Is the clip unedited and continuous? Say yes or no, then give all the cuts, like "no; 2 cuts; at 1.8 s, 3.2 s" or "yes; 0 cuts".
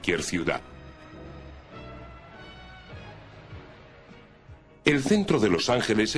no; 1 cut; at 4.3 s